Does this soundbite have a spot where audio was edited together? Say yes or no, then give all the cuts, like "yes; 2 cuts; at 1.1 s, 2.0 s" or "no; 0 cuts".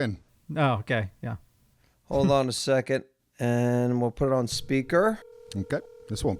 yes; 1 cut; at 3.1 s